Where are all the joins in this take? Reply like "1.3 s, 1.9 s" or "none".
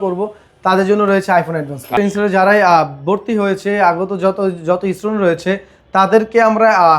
1.9 s